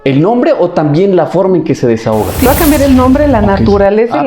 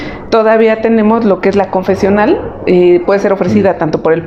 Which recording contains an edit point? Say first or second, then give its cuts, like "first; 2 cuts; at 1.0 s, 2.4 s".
first; 1 cut; at 2.5 s